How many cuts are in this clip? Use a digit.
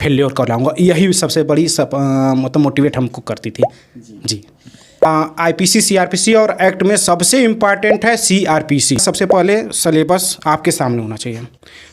2